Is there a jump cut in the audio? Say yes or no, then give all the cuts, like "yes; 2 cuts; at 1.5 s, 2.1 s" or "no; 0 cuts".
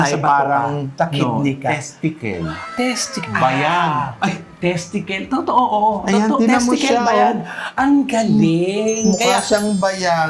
no; 0 cuts